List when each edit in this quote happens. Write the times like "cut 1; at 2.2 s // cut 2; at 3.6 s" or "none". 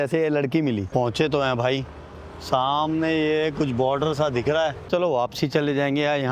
cut 1; at 0.9 s // cut 2; at 4.9 s

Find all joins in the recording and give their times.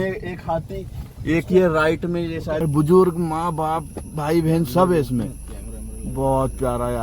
cut 1; at 2.6 s

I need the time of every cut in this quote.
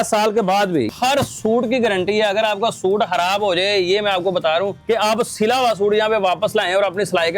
cut 1; at 0.9 s // cut 2; at 4.8 s

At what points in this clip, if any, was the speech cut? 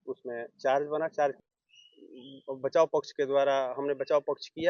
cut 1; at 1.4 s

